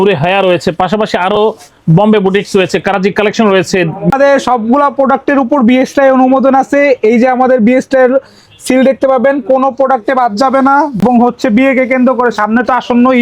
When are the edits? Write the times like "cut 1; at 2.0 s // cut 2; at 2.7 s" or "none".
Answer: cut 1; at 4.1 s // cut 2; at 11.0 s